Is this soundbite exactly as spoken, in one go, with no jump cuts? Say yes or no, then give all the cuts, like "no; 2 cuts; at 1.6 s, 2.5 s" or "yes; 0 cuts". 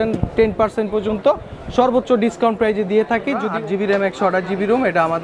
no; 1 cut; at 3.4 s